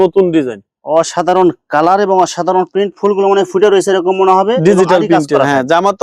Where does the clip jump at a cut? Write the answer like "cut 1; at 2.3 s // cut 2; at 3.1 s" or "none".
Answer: none